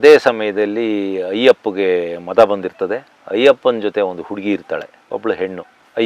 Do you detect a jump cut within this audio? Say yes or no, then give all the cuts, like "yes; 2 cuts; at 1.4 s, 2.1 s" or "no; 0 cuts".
no; 0 cuts